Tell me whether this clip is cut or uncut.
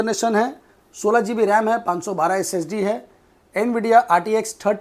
uncut